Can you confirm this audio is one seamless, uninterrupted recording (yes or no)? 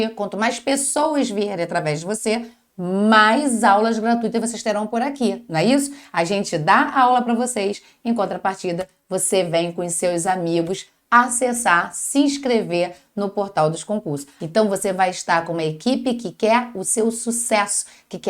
no